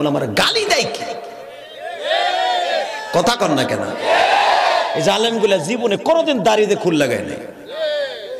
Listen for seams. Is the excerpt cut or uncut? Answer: uncut